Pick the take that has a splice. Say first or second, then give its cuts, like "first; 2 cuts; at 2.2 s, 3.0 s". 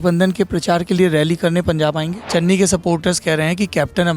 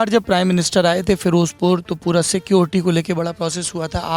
first; 1 cut; at 2.2 s